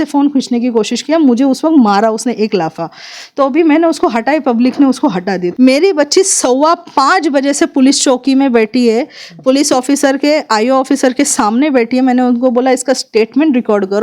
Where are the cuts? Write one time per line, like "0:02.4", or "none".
0:05.5